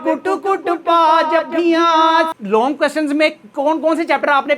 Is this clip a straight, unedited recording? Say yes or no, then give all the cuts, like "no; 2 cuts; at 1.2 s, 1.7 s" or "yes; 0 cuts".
no; 1 cut; at 2.3 s